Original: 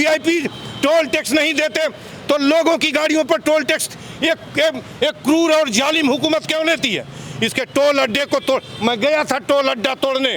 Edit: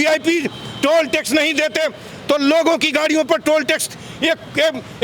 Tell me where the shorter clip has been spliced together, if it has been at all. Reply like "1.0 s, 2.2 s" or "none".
none